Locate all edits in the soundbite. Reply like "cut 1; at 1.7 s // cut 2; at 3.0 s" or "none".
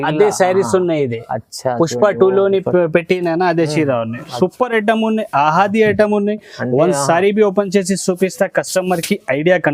none